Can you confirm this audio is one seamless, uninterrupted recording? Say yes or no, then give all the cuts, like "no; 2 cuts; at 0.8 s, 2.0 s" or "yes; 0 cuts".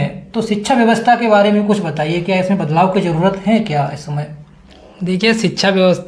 yes; 0 cuts